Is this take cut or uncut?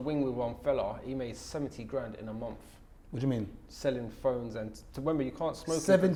uncut